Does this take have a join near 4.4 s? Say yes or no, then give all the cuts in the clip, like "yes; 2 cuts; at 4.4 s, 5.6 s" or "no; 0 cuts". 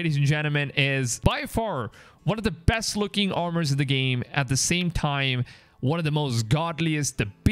no; 1 cut; at 1.1 s